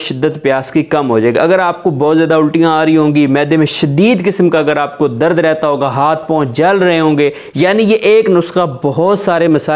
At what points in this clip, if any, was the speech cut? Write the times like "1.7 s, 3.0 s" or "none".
none